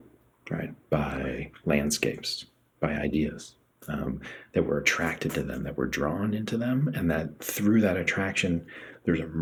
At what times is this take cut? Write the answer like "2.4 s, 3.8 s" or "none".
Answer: none